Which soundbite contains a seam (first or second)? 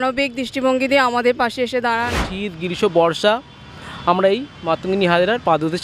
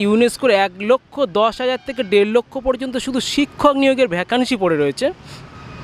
first